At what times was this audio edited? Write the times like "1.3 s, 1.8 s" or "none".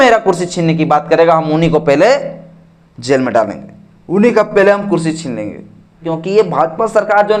6.1 s